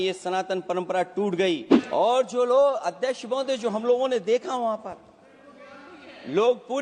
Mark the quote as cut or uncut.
cut